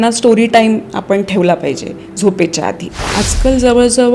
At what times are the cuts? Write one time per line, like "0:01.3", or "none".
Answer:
0:02.9